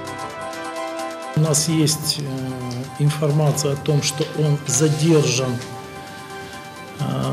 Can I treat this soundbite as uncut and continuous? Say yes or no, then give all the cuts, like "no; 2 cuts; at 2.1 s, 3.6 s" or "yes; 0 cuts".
no; 1 cut; at 1.2 s